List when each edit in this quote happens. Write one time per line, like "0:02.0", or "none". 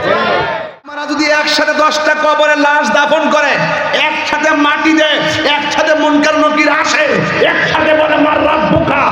0:01.0